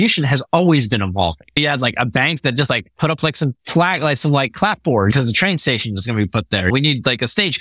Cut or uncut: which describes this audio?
cut